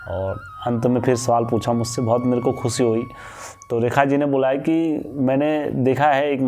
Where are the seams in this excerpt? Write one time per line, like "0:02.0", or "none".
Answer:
none